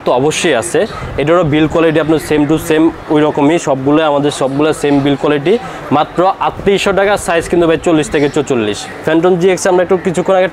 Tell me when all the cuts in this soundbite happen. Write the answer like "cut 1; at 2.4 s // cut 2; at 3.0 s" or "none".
cut 1; at 8.9 s